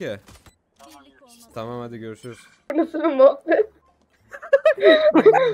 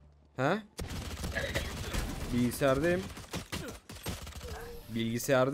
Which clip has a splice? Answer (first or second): first